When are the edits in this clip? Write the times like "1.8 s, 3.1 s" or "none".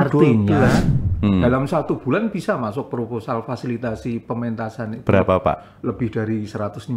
0.9 s